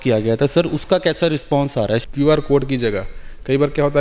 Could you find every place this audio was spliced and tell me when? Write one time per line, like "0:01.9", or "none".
0:02.0